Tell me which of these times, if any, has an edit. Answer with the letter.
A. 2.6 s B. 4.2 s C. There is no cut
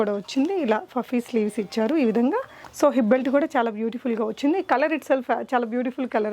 A